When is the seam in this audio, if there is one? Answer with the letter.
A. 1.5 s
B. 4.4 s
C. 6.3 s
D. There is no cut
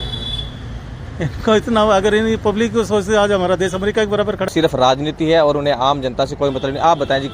B